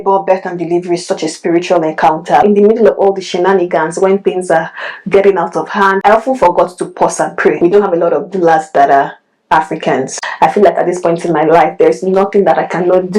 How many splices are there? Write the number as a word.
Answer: three